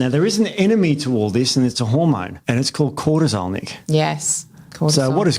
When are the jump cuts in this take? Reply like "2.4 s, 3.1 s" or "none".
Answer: 2.3 s